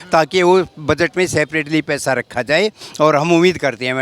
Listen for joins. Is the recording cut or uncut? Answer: uncut